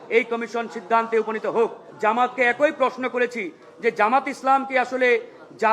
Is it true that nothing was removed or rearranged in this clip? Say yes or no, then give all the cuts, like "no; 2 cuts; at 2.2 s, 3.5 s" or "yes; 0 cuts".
no; 1 cut; at 1.8 s